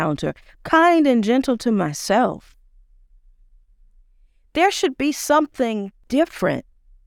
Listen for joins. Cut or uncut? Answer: cut